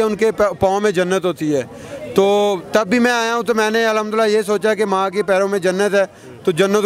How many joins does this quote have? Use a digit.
0